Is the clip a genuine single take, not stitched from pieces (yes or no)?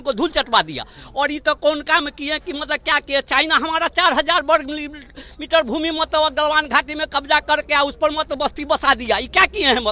yes